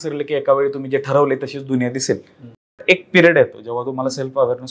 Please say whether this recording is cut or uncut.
cut